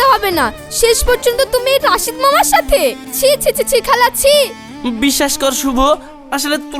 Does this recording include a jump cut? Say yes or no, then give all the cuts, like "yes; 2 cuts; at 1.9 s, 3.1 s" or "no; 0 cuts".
no; 0 cuts